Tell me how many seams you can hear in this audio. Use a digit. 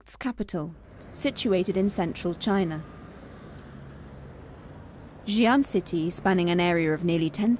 0